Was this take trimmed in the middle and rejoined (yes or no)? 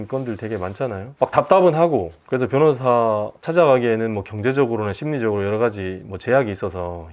yes